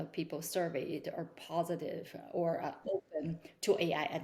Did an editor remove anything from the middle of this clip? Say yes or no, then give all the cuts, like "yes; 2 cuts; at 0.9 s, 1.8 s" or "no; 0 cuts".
no; 0 cuts